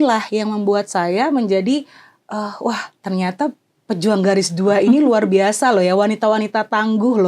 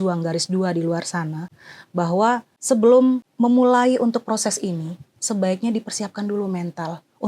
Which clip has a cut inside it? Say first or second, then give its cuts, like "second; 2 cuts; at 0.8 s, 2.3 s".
second; 2 cuts; at 2.5 s, 3.3 s